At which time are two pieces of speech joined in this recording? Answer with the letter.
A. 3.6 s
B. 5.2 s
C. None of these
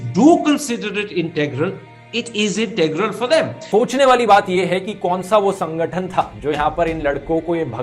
A